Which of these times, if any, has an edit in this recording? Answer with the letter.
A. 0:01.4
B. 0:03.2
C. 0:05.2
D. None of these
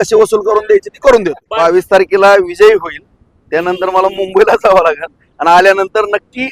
A